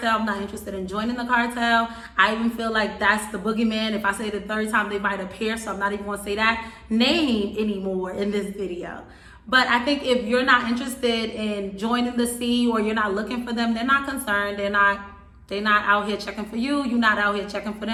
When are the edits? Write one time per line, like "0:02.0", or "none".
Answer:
none